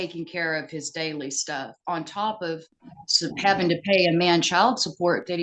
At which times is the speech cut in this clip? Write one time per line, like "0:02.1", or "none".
none